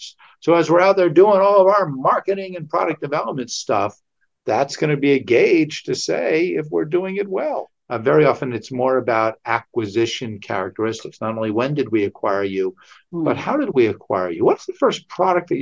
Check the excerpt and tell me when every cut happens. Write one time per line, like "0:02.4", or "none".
0:07.8